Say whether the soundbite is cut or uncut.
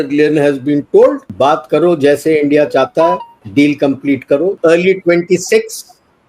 cut